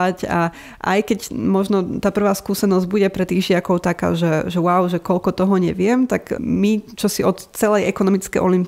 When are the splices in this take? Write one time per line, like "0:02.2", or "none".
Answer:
0:06.4